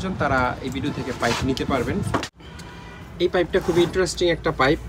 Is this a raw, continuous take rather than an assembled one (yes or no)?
no